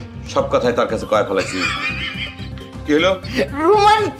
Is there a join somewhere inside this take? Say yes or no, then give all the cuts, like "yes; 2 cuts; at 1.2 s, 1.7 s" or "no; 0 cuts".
yes; 1 cut; at 2.5 s